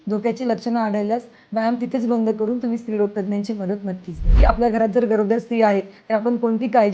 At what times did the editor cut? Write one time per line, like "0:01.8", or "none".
0:04.4